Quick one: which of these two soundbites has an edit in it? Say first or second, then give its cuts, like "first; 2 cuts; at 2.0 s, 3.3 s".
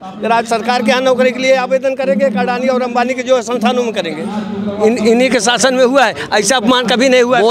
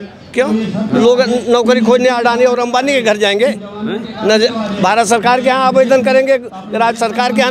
first; 1 cut; at 4.4 s